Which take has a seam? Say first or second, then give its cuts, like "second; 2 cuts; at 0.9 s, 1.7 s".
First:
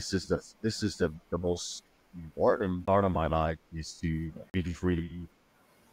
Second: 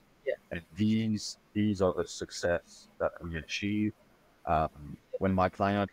first; 2 cuts; at 2.8 s, 4.4 s